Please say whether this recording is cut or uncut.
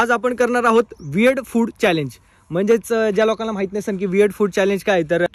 uncut